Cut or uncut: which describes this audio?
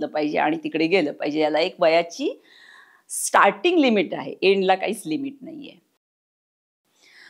cut